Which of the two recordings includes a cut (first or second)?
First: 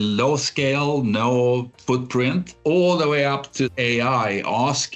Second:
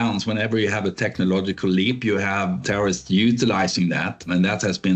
first